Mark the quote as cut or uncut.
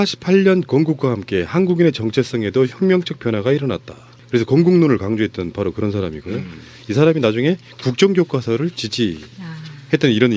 cut